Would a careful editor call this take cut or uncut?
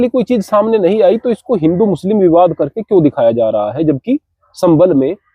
uncut